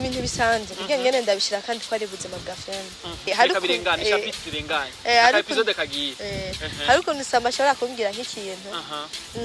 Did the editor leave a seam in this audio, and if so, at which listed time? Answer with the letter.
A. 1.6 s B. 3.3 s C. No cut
B